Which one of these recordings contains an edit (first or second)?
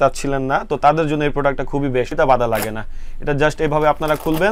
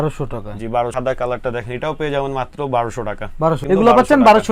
second